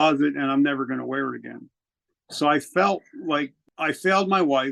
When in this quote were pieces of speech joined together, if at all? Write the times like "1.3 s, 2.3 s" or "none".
3.6 s